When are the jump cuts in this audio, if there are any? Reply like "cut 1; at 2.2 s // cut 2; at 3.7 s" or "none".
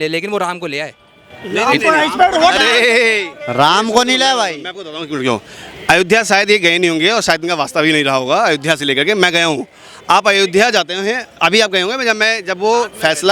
none